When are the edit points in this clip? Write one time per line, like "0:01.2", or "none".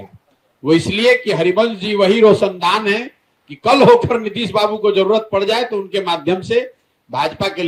none